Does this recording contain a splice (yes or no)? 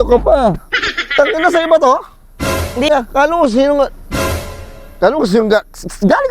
yes